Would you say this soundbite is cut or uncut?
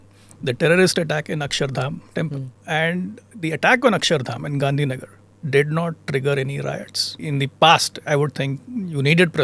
cut